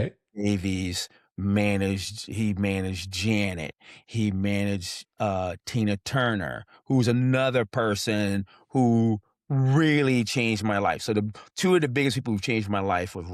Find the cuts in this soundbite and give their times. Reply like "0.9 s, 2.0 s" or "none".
none